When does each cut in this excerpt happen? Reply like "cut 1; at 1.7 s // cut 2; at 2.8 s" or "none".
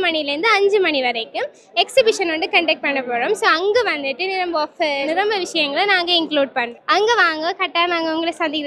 cut 1; at 5.0 s // cut 2; at 6.7 s